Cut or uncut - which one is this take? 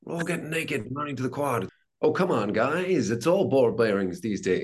cut